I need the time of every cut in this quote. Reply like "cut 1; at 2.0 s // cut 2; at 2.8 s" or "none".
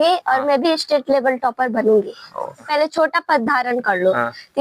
cut 1; at 2.6 s